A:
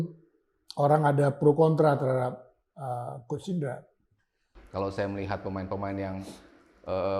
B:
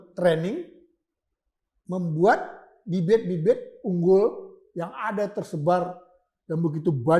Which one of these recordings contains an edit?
A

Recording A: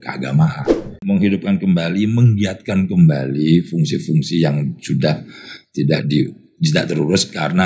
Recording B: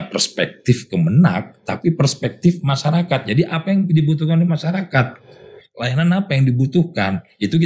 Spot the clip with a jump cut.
A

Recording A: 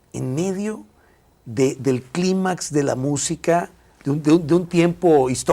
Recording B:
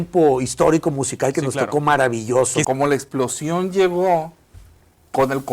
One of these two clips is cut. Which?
B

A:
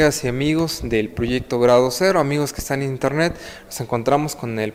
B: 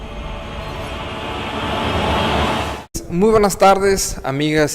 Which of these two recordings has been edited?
B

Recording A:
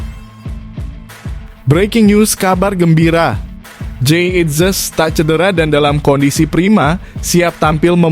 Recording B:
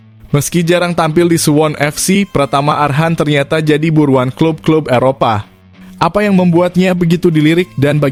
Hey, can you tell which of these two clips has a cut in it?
A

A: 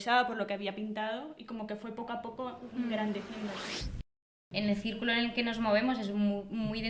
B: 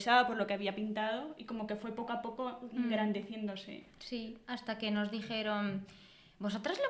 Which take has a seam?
A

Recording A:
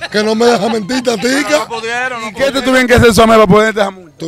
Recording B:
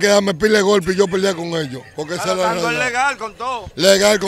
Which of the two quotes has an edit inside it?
A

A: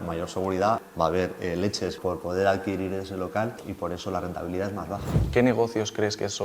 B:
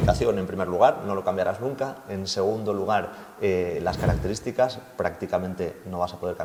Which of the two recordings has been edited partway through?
A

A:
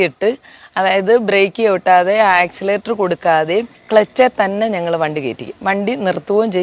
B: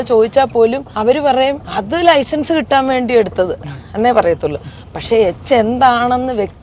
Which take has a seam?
B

